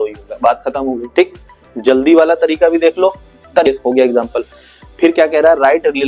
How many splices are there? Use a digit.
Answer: 1